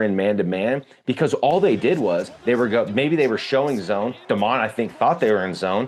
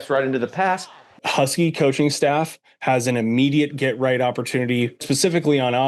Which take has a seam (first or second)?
second